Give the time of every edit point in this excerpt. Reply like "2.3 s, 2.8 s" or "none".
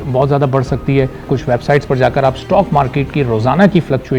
1.3 s

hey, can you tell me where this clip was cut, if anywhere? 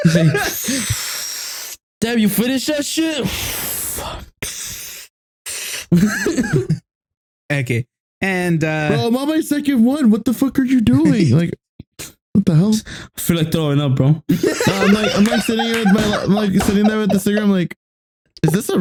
none

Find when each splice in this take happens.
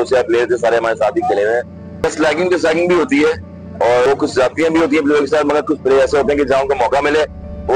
1.8 s, 4.1 s

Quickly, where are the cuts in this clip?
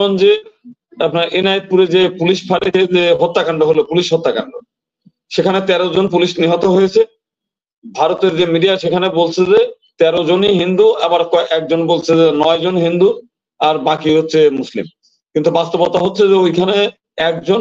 none

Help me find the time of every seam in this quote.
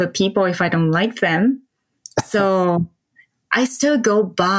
none

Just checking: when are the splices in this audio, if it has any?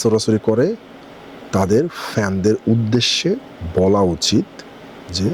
none

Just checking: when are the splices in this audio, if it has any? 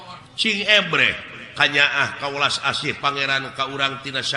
none

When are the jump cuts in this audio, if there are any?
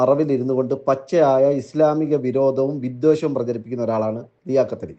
none

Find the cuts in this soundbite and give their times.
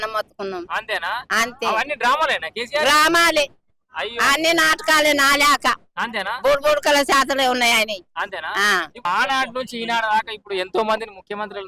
9.0 s

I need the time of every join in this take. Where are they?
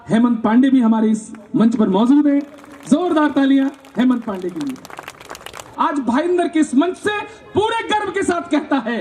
5.6 s

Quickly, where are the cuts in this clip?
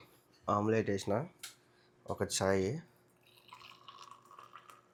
none

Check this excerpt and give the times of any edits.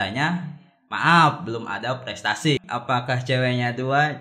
2.6 s

